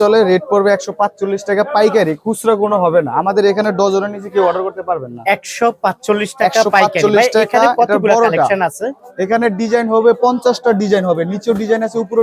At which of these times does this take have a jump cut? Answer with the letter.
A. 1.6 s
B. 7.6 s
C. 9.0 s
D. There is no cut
D